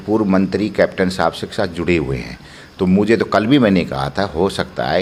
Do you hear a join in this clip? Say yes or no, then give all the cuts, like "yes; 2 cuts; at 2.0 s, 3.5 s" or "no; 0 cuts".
no; 0 cuts